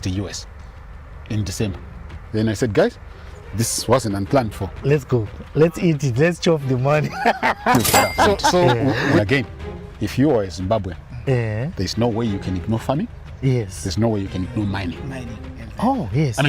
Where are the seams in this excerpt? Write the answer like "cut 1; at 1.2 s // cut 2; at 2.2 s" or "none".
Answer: cut 1; at 9.2 s